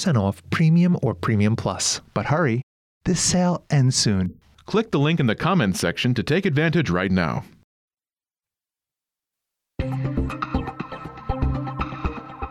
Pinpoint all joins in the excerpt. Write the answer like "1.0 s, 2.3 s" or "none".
none